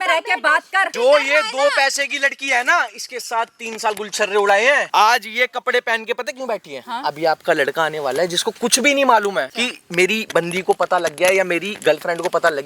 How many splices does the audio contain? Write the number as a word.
three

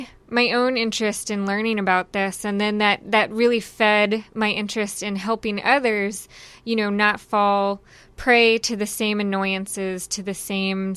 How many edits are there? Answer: zero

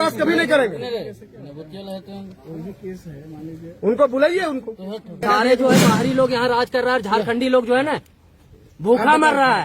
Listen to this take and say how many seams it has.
one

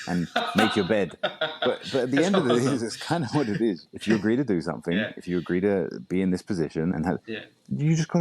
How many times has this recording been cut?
two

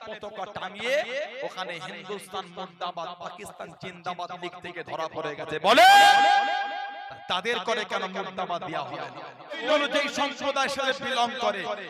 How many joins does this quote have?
one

